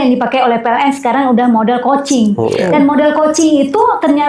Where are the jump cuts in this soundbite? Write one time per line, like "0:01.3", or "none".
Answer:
none